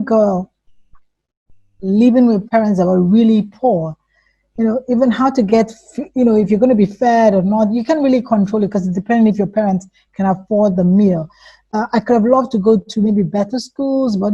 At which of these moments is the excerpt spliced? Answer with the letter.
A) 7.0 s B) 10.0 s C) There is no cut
C